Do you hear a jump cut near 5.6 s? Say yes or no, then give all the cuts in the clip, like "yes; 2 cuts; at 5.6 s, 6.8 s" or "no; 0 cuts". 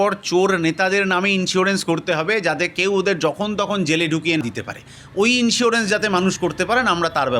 no; 1 cut; at 4.4 s